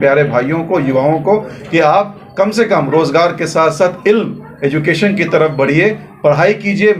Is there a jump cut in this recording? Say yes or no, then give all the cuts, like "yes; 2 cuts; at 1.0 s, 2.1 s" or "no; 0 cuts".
no; 0 cuts